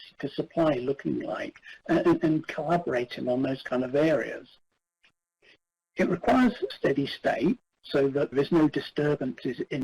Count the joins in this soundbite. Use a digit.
2